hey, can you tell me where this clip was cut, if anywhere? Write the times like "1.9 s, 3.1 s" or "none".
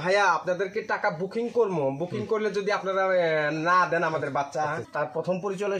4.8 s